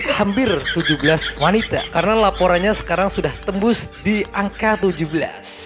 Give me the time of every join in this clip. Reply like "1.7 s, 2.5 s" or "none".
none